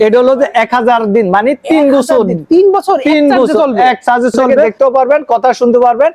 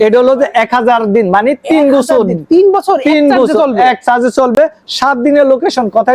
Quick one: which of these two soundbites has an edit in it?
first; 1 cut; at 4.7 s

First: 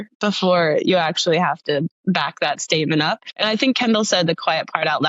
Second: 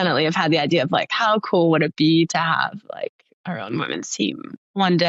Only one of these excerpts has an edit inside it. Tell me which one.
first; 2 cuts; at 1.9 s, 3.3 s

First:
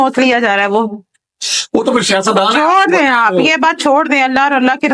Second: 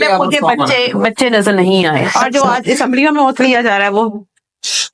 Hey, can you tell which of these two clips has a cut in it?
second; 1 cut; at 2.2 s

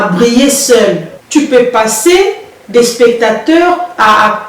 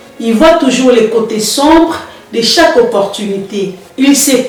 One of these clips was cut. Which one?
first; 1 cut; at 1.1 s

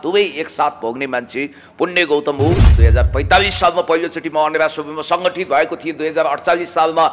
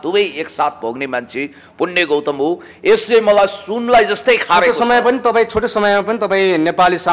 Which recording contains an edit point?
first; 1 cut; at 2.7 s

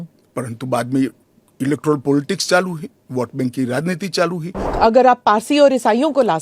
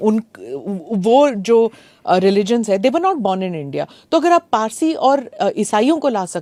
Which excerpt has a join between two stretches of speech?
first; 1 cut; at 4.6 s

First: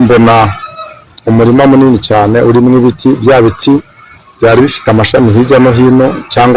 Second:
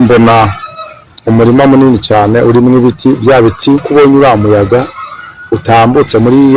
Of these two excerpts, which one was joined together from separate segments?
second; 1 cut; at 3.9 s

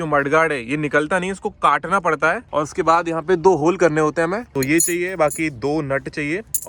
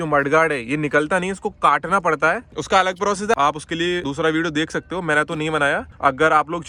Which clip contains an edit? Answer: first; 2 cuts; at 2.5 s, 4.5 s

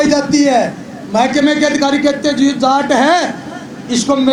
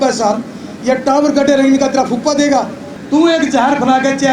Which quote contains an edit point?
second; 1 cut; at 2.9 s

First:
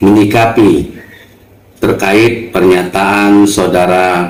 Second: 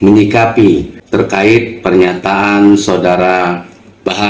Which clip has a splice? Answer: second; 1 cut; at 1.0 s

